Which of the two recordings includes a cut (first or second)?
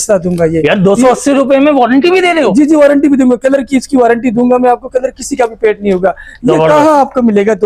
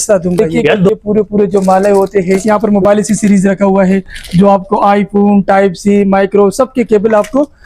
second